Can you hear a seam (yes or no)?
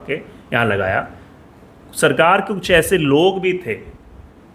no